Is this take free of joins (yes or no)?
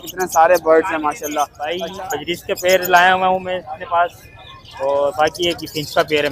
no